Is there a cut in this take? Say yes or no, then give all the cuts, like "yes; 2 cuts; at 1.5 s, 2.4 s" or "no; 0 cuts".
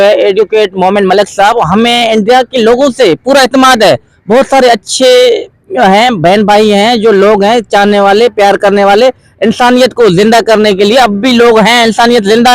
no; 0 cuts